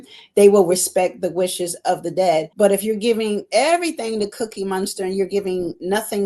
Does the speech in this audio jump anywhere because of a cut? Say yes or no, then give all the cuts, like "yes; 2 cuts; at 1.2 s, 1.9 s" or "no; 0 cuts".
yes; 1 cut; at 2.5 s